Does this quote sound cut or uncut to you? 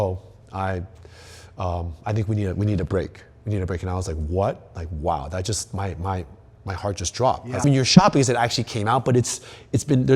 uncut